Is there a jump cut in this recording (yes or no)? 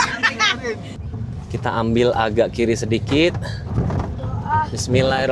yes